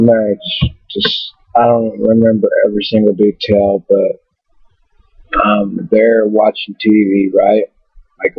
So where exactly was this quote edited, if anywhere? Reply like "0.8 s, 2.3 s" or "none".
3.8 s